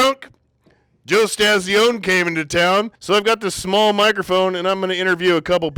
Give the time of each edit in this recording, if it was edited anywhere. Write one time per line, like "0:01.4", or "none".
0:03.0